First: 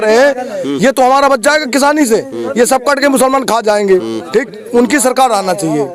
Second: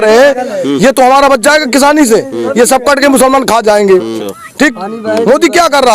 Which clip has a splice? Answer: second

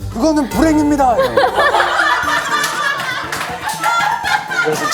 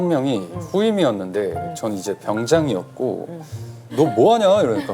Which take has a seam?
second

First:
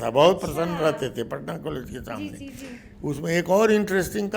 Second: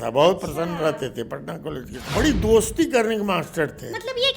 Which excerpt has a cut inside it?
second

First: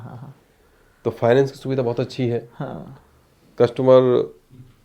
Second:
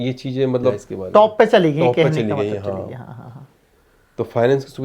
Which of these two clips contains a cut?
second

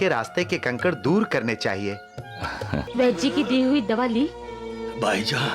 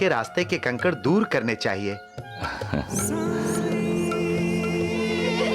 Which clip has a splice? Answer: first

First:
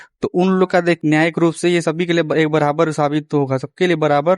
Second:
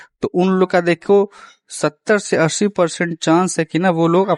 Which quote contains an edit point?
first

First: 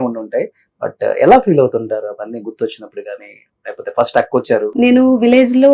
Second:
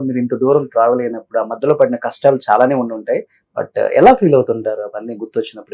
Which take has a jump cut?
first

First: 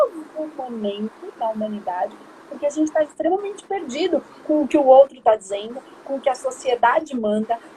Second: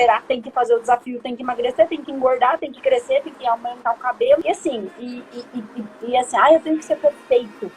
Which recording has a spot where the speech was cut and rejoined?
second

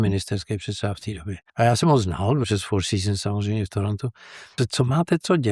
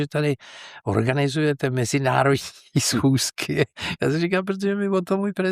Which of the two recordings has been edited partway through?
first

